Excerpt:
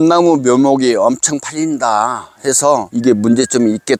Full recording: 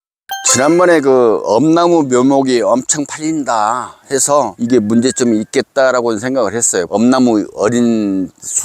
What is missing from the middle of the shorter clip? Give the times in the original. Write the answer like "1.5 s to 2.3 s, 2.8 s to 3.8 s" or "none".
none